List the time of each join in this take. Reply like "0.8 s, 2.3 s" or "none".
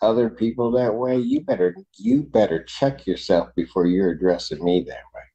none